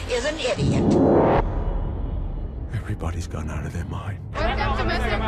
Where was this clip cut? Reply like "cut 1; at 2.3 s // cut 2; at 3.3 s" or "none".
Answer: cut 1; at 4.4 s